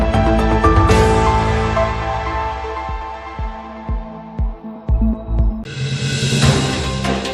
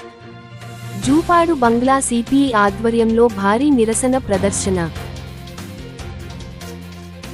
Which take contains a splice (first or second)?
first